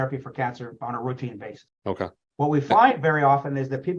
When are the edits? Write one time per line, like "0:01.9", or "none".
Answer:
0:02.0